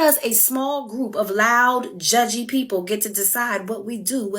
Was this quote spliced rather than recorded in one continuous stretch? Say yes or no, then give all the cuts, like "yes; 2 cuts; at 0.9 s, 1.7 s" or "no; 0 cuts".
yes; 1 cut; at 2.9 s